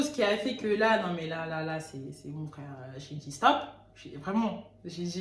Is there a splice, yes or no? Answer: no